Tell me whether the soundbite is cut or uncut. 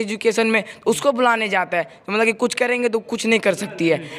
uncut